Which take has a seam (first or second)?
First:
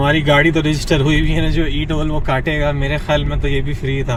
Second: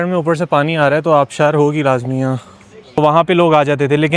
second